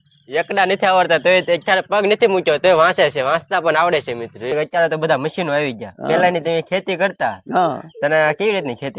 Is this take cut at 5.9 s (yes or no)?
no